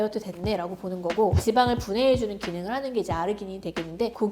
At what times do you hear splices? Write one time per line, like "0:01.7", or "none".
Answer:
0:01.4